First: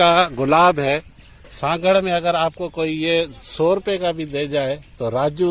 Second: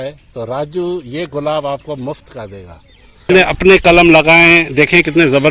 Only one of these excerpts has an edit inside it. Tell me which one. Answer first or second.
second